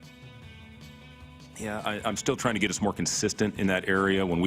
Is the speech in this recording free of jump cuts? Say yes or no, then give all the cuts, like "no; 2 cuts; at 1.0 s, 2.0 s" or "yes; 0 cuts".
no; 1 cut; at 1.5 s